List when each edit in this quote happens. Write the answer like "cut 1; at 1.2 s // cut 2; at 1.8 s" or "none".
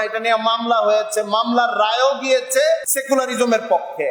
cut 1; at 2.9 s